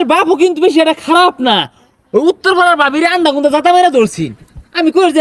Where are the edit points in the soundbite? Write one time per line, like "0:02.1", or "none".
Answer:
none